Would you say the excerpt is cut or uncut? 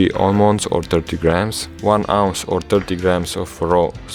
uncut